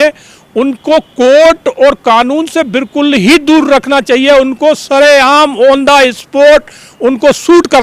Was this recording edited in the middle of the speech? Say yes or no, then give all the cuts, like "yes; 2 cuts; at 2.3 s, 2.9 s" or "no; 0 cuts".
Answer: no; 0 cuts